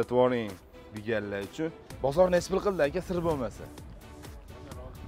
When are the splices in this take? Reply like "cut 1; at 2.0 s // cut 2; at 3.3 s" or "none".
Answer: cut 1; at 1.9 s